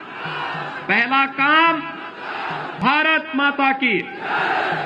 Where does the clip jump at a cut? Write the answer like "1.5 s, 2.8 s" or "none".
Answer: 2.7 s